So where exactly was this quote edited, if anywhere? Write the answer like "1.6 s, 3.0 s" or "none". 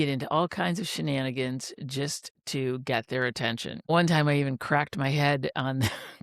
3.9 s